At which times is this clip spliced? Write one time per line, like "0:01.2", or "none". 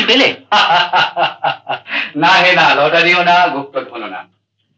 none